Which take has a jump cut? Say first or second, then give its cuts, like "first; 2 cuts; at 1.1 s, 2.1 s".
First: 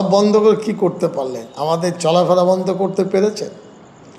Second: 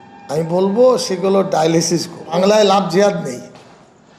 second; 1 cut; at 2.3 s